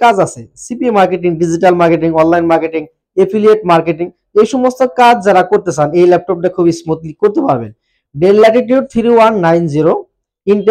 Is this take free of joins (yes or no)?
yes